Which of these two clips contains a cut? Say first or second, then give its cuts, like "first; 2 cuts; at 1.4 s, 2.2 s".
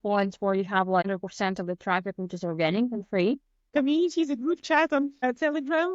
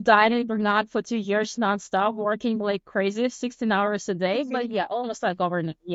first; 3 cuts; at 1.0 s, 3.7 s, 5.2 s